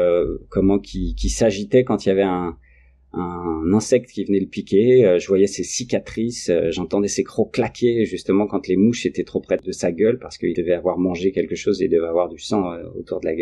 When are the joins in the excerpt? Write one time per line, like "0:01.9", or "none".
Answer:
0:09.7
0:10.5